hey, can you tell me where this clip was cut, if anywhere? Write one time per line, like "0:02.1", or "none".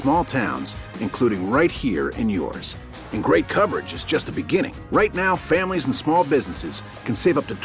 none